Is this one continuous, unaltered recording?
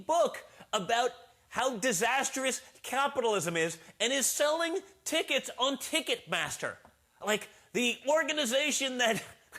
yes; 0 cuts

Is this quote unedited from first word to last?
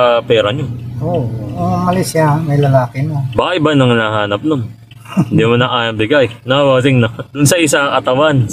no; 1 cut; at 3.2 s

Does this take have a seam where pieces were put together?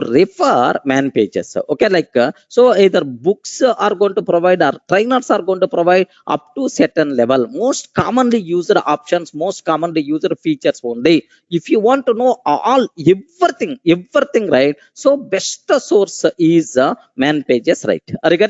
no; 0 cuts

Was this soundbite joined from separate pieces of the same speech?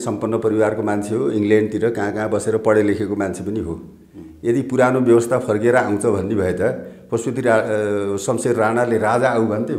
no; 0 cuts

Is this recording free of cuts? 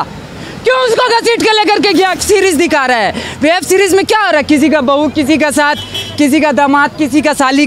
no; 1 cut; at 2.2 s

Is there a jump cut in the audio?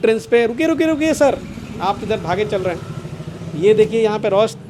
no; 0 cuts

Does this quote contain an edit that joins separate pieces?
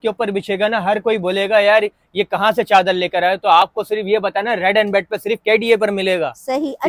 no; 0 cuts

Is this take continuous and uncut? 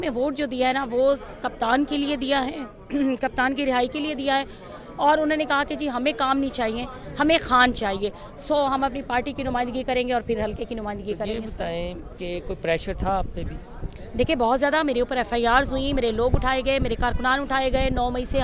yes; 0 cuts

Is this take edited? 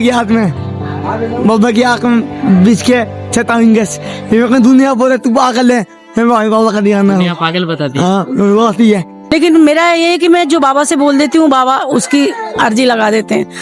yes; 1 cut; at 9.2 s

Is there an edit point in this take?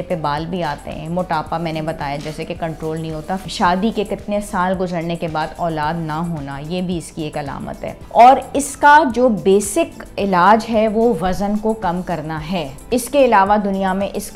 yes; 3 cuts; at 3.4 s, 8.0 s, 12.8 s

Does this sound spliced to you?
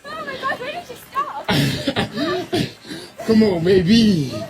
yes; 1 cut; at 2.8 s

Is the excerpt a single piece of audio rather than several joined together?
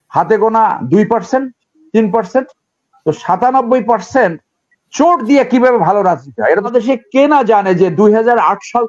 no; 1 cut; at 6.7 s

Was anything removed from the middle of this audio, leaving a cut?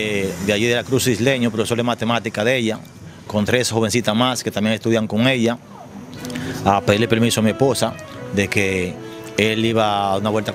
no; 0 cuts

